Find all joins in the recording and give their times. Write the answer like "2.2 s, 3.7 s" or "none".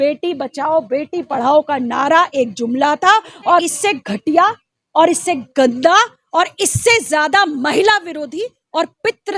3.7 s

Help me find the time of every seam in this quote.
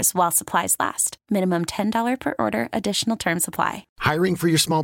3.8 s

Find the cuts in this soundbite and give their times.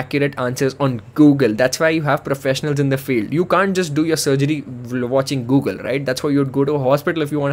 none

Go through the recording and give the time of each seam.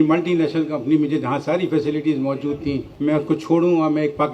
none

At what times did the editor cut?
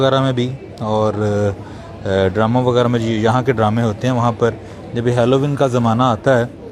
none

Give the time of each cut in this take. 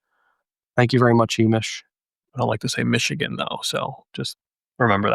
2.3 s

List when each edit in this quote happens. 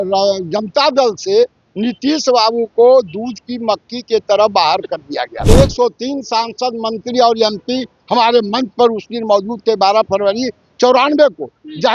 5.3 s

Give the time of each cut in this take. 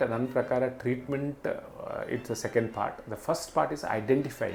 none

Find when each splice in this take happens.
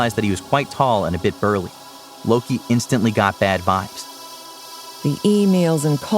4.4 s

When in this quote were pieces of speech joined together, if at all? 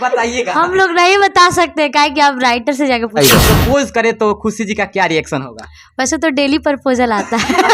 3.4 s

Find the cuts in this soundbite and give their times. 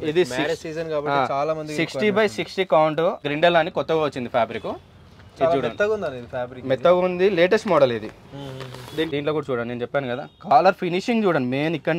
3.3 s, 9.1 s

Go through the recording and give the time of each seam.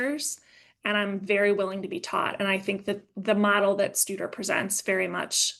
none

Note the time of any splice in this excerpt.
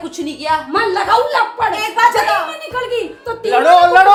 none

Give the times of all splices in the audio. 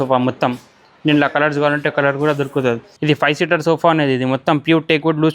2.9 s

